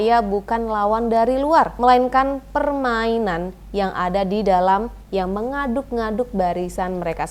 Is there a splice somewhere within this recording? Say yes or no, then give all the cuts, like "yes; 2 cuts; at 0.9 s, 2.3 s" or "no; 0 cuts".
yes; 1 cut; at 1.7 s